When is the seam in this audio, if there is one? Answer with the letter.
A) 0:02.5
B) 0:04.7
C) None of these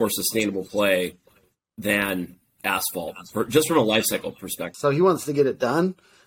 B